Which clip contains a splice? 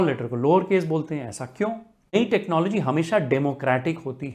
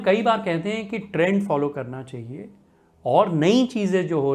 first; 1 cut; at 2.1 s

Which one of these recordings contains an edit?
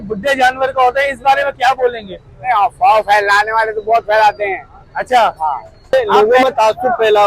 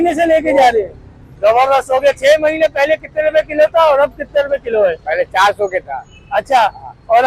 first; 1 cut; at 5.9 s

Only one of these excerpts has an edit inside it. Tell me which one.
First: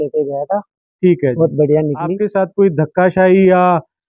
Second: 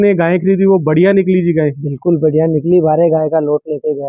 first; 1 cut; at 2.2 s

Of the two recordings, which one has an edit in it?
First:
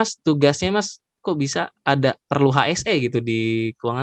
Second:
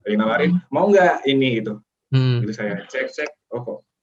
second; 1 cut; at 1.9 s

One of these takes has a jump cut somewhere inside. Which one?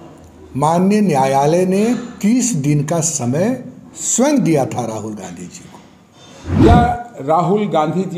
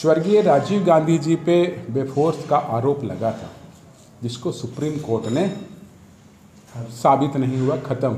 first; 1 cut; at 6.6 s

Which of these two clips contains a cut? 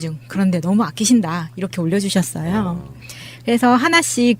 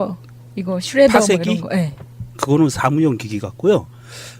second; 1 cut; at 3.4 s

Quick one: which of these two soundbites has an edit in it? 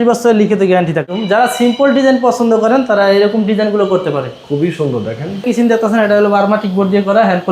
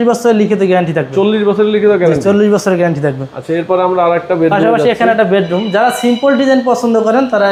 first; 2 cuts; at 1.1 s, 5.4 s

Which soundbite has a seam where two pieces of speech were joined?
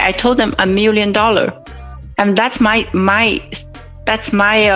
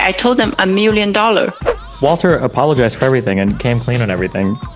second; 1 cut; at 1.8 s

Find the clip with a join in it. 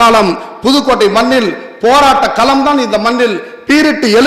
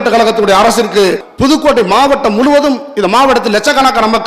second; 1 cut; at 1.2 s

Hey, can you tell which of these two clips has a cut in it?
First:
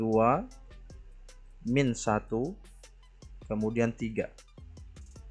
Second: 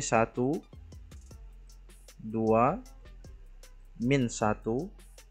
first; 1 cut; at 4.3 s

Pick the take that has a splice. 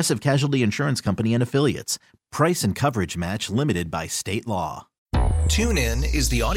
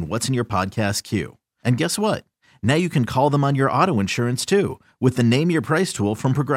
first; 1 cut; at 4.9 s

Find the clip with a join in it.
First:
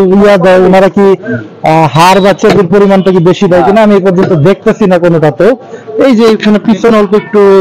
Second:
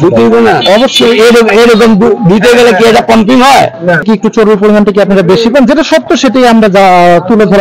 second; 1 cut; at 4.0 s

